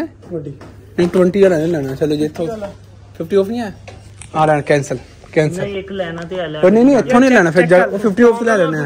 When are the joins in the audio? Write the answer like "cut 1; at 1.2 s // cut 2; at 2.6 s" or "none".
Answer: none